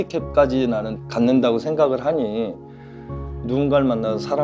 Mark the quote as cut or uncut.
uncut